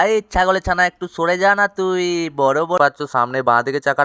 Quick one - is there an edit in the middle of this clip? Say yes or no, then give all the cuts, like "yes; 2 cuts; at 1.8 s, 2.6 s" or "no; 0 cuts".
yes; 1 cut; at 2.8 s